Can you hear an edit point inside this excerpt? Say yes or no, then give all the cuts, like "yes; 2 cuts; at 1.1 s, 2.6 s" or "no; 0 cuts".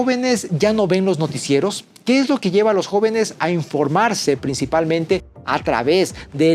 no; 0 cuts